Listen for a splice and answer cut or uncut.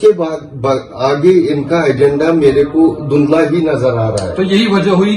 uncut